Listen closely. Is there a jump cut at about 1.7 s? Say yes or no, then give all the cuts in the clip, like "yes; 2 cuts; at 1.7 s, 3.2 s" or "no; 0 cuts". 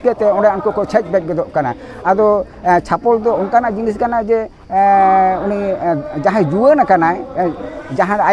no; 0 cuts